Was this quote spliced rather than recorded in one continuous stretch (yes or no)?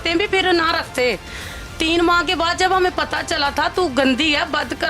no